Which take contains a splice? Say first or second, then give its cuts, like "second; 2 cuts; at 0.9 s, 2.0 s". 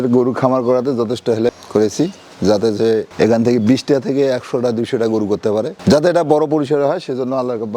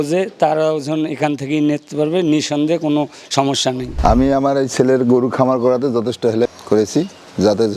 second; 1 cut; at 3.9 s